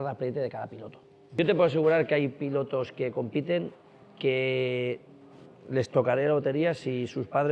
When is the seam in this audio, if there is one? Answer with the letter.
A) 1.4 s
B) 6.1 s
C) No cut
A